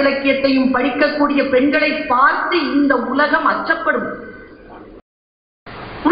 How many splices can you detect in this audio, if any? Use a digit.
1